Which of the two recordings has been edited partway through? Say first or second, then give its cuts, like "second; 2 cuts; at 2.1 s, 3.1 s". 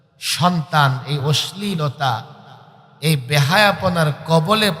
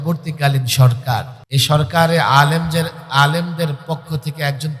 second; 1 cut; at 1.4 s